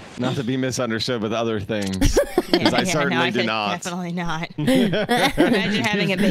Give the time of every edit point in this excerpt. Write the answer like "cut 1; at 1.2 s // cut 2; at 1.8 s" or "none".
none